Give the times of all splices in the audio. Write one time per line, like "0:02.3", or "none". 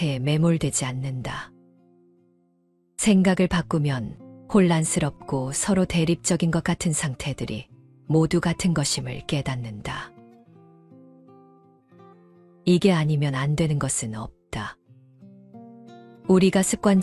0:01.5
0:02.9